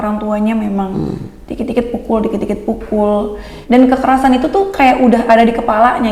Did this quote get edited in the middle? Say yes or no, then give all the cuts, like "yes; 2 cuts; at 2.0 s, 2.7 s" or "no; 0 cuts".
yes; 1 cut; at 3.5 s